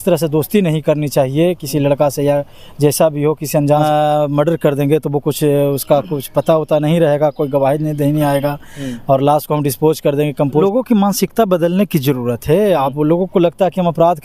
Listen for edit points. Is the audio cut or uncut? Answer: cut